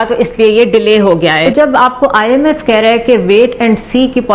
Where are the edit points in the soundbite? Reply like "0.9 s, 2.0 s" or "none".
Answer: 1.4 s